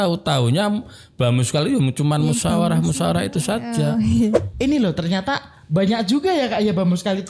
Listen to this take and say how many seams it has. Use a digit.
1